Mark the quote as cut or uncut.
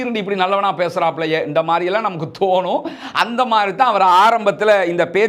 uncut